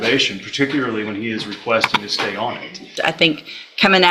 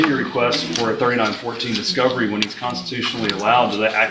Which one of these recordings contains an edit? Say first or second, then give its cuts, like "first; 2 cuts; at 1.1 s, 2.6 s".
first; 1 cut; at 2.9 s